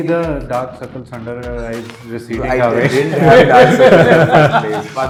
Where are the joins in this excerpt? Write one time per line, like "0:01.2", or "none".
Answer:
none